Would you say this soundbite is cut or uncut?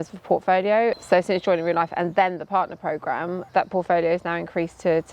cut